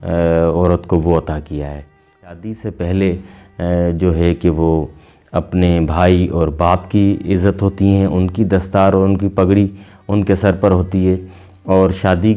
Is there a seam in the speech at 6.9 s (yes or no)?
no